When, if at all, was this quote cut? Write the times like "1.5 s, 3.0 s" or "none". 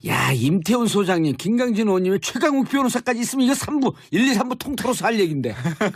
1.8 s